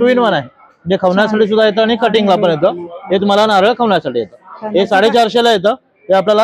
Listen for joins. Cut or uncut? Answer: uncut